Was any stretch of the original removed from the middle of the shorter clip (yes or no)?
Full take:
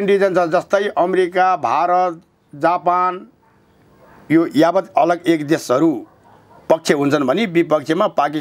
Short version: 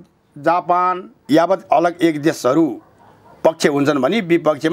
yes